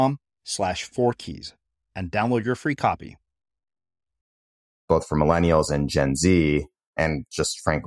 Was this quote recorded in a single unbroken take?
no; 2 cuts; at 4.9 s, 6.9 s

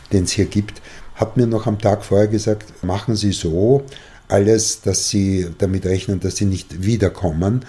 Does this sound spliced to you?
yes; 1 cut; at 2.8 s

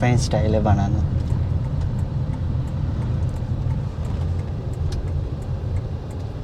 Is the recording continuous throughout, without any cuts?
yes; 0 cuts

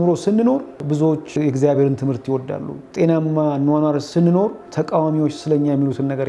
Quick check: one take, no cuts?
no; 3 cuts; at 1.2 s, 2.8 s, 4.4 s

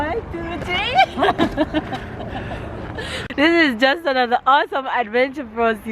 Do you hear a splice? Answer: yes; 1 cut; at 3.2 s

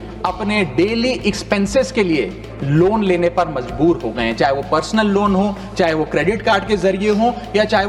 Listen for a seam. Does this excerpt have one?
no; 0 cuts

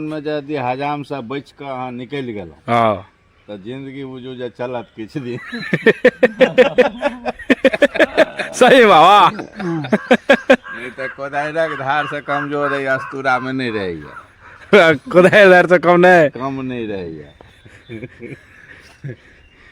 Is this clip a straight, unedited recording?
yes; 0 cuts

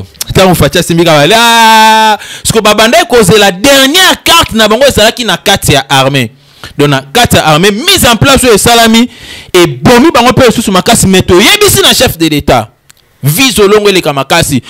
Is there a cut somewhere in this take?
no; 0 cuts

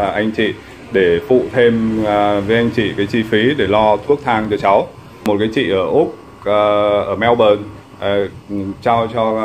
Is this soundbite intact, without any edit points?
no; 1 cut; at 5.1 s

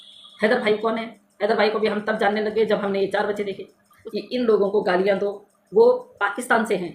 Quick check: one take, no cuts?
no; 1 cut; at 4.0 s

